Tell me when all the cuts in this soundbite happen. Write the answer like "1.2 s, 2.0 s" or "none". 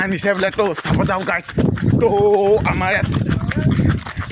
1.8 s

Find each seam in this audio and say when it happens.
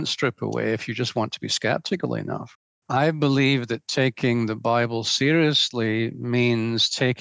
2.5 s

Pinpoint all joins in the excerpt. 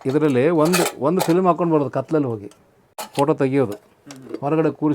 3.1 s

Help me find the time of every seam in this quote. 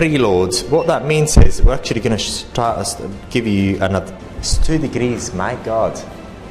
4.1 s

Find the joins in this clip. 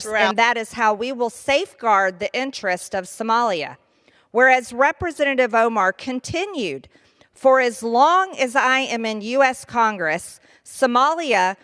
none

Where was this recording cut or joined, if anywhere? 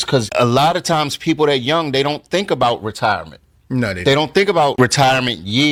none

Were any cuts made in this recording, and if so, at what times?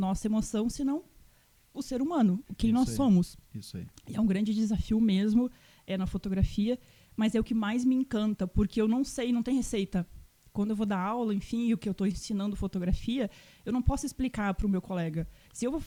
none

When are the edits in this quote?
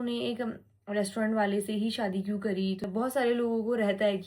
2.8 s

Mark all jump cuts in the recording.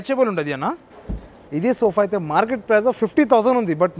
1.4 s

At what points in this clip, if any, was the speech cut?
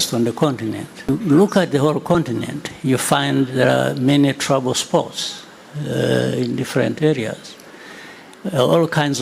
1.1 s

